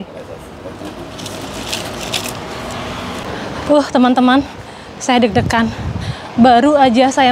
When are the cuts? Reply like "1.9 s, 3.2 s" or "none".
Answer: 3.3 s